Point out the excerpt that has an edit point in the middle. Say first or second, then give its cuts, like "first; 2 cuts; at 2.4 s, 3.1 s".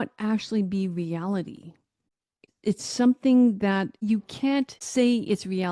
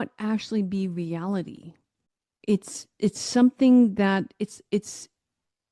first; 2 cuts; at 2.3 s, 3.9 s